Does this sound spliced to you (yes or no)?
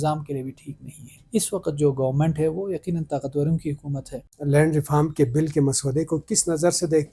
yes